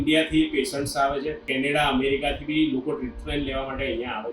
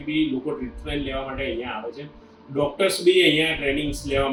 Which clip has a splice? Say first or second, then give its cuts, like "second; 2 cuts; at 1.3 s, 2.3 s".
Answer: first; 1 cut; at 1.5 s